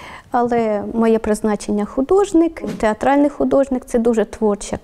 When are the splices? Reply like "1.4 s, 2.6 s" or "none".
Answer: 2.6 s